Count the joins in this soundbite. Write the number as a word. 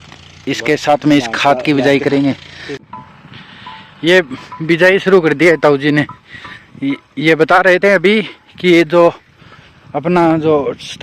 one